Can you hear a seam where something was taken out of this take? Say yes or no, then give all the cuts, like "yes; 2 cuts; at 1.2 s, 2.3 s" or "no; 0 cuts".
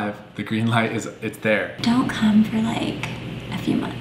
yes; 1 cut; at 1.7 s